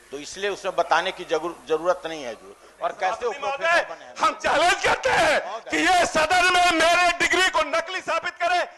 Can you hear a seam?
no; 0 cuts

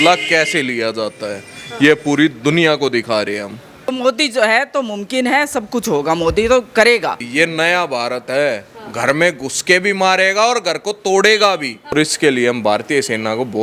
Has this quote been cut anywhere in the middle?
yes; 3 cuts; at 3.9 s, 7.3 s, 11.9 s

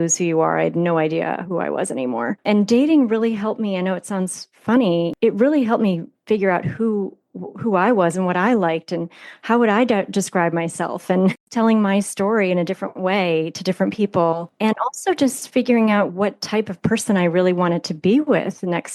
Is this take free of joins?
no; 4 cuts; at 2.4 s, 5.1 s, 11.4 s, 14.5 s

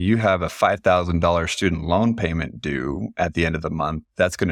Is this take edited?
no; 0 cuts

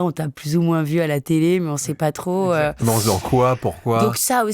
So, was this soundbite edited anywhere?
no; 0 cuts

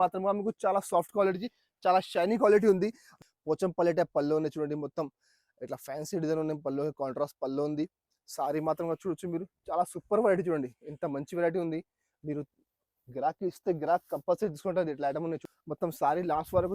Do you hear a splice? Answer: yes; 2 cuts; at 3.0 s, 15.5 s

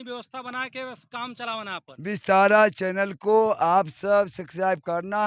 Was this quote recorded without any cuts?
no; 1 cut; at 1.9 s

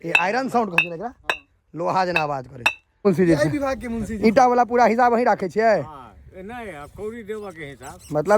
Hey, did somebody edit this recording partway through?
yes; 1 cut; at 2.8 s

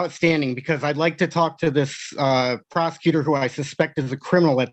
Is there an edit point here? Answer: no; 0 cuts

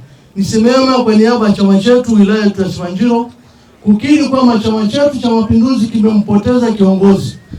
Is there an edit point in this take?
no; 0 cuts

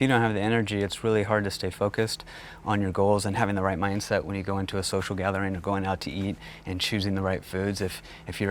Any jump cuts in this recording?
no; 0 cuts

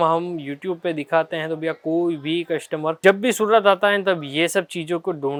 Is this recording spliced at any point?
no; 0 cuts

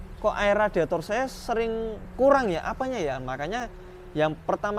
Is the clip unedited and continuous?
yes; 0 cuts

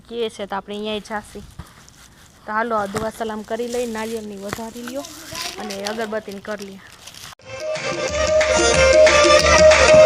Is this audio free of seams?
yes; 0 cuts

